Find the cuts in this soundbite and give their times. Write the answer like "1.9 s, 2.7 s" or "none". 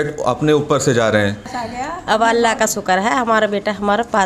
1.5 s